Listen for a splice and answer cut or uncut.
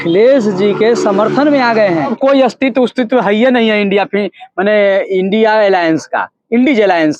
cut